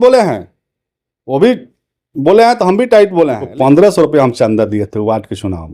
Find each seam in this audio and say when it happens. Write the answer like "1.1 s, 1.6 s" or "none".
3.4 s